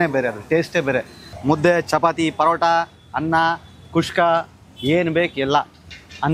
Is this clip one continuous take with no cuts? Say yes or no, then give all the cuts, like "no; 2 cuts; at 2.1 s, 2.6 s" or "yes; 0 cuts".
no; 1 cut; at 1.2 s